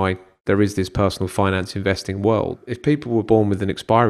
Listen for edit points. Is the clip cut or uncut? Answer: cut